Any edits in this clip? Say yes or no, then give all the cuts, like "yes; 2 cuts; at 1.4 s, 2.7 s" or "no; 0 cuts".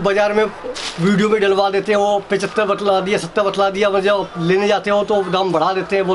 no; 0 cuts